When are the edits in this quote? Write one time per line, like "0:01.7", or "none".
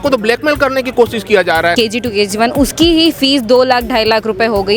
0:01.7